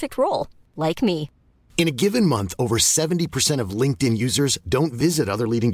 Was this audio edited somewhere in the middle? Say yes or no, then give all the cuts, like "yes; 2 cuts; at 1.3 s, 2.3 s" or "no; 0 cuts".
no; 0 cuts